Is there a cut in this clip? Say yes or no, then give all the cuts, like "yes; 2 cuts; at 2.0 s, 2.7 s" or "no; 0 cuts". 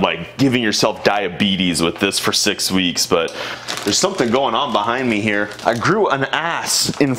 yes; 2 cuts; at 3.5 s, 5.5 s